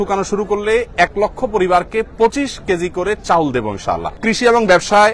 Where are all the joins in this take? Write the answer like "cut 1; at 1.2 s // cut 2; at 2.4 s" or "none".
cut 1; at 4.2 s